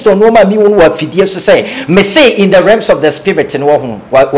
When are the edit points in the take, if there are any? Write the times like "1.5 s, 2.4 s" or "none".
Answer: none